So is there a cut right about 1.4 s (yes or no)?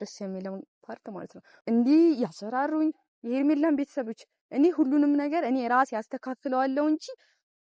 yes